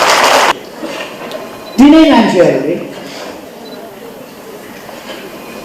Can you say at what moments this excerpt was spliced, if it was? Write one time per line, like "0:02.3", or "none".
none